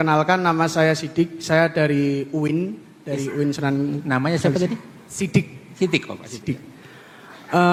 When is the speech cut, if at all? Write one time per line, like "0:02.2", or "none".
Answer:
none